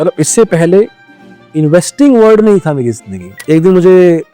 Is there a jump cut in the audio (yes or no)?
yes